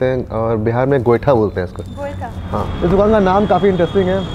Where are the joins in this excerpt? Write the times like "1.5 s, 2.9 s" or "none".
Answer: 2.7 s